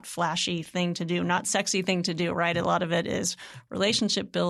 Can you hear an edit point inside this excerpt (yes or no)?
no